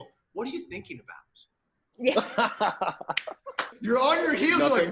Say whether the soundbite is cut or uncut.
cut